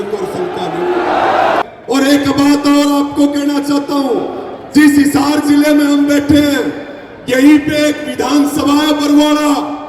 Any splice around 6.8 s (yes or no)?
no